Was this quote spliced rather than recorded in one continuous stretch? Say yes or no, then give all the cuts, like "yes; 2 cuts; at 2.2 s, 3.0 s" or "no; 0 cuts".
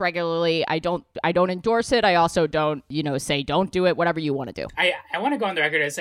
yes; 3 cuts; at 1.1 s, 2.9 s, 4.8 s